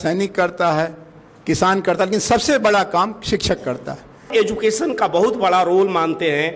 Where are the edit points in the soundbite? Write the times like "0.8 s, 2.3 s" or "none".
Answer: 4.3 s